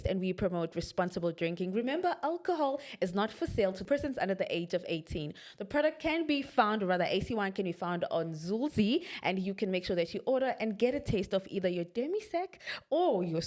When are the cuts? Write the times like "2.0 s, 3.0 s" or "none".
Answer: none

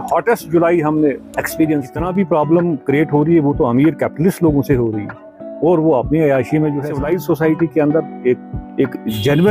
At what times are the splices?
2.1 s, 6.9 s

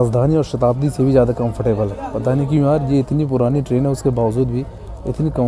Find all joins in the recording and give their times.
none

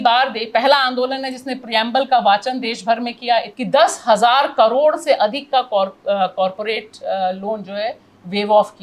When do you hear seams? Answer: 3.5 s

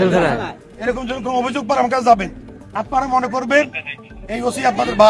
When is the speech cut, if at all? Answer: 2.7 s

